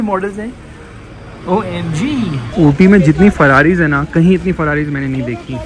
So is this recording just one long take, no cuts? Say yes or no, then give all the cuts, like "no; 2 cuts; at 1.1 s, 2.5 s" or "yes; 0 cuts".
no; 1 cut; at 2.5 s